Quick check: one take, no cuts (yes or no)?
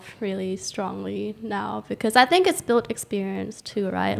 yes